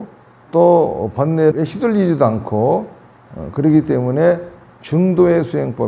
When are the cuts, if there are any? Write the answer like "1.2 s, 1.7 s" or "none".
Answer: none

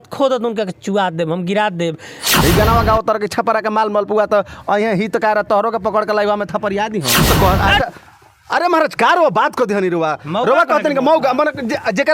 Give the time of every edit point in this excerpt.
2.3 s, 7.2 s

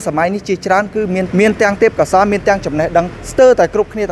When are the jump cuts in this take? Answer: 1.3 s, 3.2 s

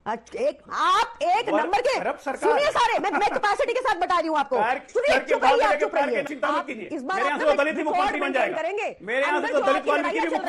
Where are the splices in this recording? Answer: 6.3 s

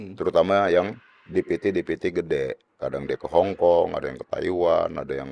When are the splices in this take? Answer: none

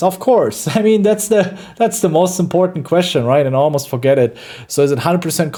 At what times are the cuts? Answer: none

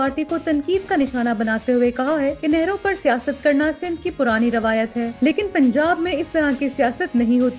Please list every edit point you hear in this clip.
none

